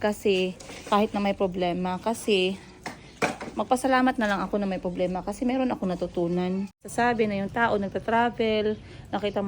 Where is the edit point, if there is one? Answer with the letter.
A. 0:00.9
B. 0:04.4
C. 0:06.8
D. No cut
C